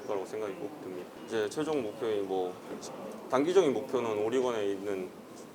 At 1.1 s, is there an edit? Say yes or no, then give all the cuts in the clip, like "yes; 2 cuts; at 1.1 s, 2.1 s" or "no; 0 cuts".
yes; 1 cut; at 1.1 s